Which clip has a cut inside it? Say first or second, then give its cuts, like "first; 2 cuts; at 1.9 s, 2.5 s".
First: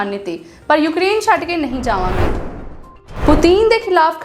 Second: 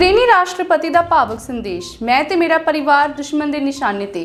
first; 1 cut; at 2.1 s